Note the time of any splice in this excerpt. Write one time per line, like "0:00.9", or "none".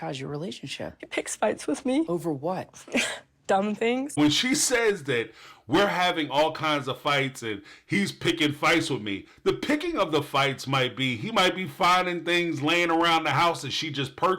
0:01.0
0:02.1
0:04.2